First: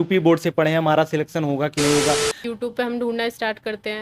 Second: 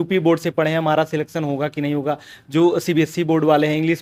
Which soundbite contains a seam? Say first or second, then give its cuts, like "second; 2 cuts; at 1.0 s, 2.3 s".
first; 1 cut; at 2.4 s